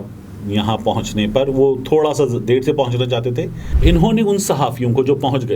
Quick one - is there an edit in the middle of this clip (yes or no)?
yes